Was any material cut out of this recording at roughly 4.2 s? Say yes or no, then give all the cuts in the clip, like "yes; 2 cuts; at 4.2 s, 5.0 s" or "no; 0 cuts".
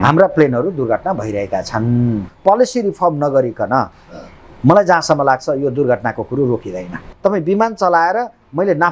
no; 2 cuts; at 2.3 s, 7.1 s